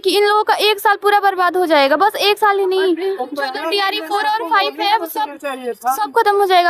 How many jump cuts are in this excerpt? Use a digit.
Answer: 0